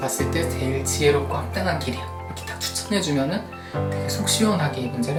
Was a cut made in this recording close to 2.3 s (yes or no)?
no